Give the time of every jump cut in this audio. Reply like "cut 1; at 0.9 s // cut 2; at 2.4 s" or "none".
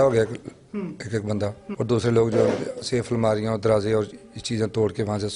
cut 1; at 1.7 s